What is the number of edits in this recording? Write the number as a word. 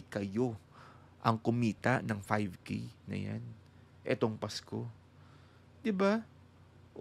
zero